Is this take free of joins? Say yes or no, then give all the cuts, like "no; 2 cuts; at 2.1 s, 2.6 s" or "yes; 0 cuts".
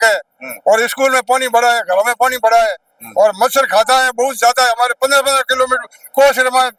yes; 0 cuts